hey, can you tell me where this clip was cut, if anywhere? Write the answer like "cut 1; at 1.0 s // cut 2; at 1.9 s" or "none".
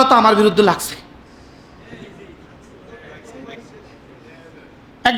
none